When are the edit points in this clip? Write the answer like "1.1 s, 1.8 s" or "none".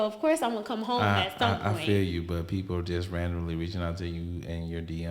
none